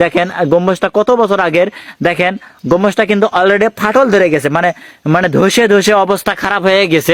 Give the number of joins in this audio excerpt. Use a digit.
0